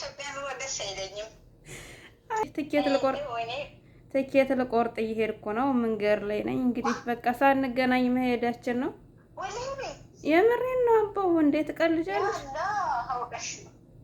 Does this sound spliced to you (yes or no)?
yes